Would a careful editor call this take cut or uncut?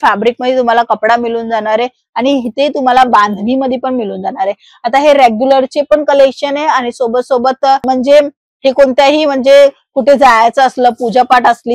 uncut